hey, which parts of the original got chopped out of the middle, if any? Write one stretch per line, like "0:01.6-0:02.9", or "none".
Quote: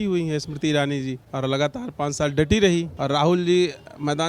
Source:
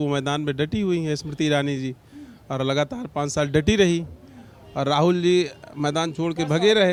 0:02.0-0:02.4
0:04.1-0:04.7